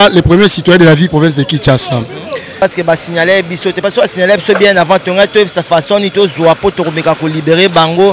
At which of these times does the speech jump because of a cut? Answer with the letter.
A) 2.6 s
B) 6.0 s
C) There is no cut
A